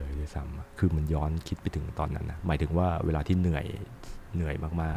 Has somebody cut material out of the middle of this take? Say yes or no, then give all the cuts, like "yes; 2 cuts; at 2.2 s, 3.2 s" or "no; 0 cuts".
no; 0 cuts